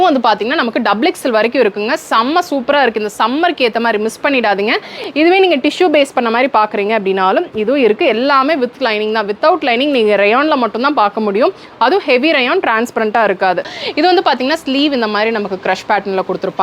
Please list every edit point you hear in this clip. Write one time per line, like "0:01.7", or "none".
0:04.9
0:13.7